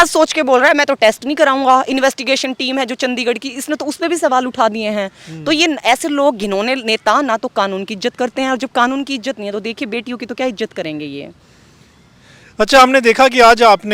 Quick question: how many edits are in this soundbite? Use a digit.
0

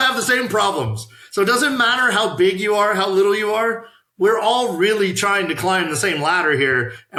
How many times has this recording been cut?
0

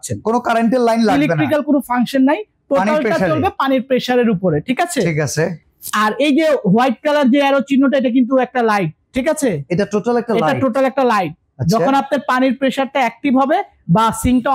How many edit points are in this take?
0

